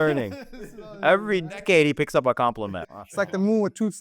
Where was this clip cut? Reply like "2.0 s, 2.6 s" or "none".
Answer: 2.9 s